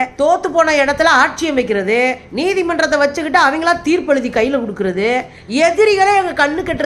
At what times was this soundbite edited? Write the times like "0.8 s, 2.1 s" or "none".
5.3 s